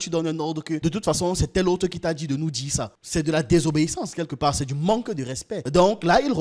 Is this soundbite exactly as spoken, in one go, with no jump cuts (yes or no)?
yes